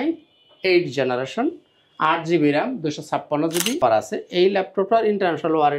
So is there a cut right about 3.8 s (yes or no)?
yes